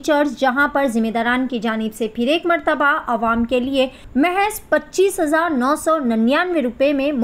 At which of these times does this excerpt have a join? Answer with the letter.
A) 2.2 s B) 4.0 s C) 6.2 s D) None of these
B